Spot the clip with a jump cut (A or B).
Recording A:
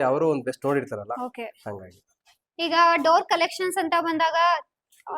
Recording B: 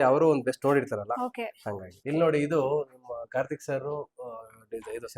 B